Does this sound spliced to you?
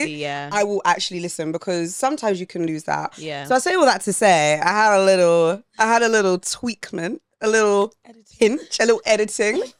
no; 0 cuts

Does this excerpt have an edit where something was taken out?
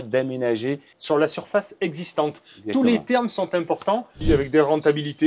yes; 2 cuts; at 0.9 s, 4.1 s

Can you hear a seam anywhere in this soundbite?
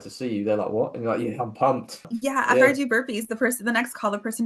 yes; 1 cut; at 2.1 s

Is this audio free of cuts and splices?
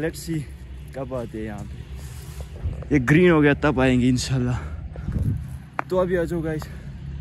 yes; 0 cuts

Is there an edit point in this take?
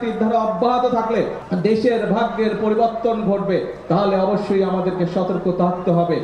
yes; 1 cut; at 1.4 s

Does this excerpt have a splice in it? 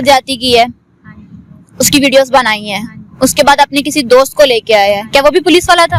no; 0 cuts

